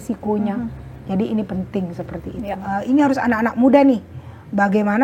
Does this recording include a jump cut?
yes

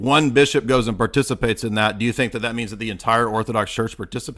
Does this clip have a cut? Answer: no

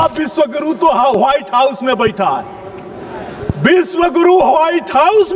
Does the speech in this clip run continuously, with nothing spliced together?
yes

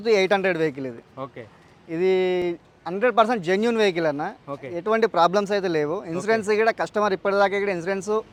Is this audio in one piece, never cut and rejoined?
yes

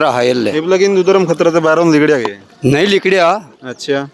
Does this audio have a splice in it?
no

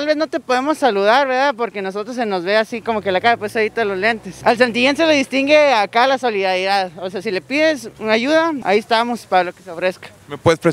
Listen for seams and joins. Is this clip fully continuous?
yes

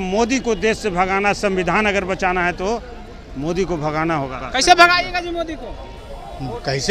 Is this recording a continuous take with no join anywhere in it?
yes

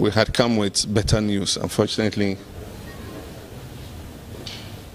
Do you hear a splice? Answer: no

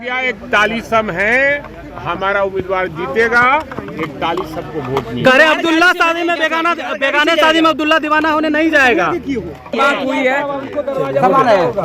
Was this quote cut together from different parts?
yes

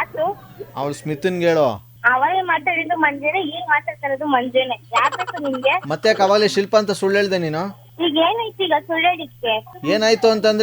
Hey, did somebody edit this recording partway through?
yes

